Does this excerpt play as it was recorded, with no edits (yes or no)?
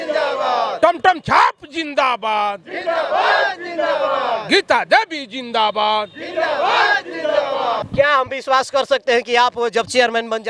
no